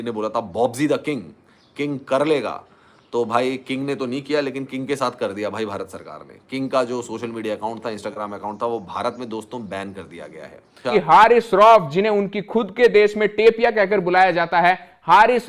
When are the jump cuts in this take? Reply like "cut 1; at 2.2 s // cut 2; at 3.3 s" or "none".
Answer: cut 1; at 10.9 s